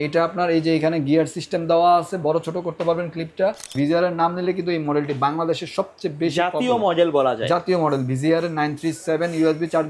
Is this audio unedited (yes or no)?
no